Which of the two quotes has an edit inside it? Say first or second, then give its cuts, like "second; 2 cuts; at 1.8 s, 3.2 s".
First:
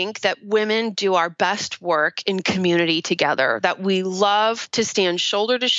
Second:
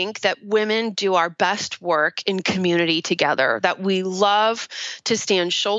first; 1 cut; at 4.6 s